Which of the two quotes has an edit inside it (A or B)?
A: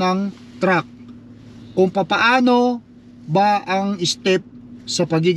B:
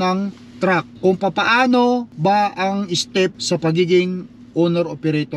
B